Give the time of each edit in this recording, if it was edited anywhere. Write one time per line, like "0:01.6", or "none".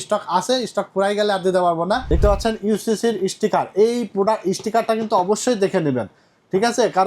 0:02.0